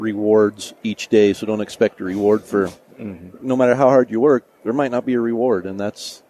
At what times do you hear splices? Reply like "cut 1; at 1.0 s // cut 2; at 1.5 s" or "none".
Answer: none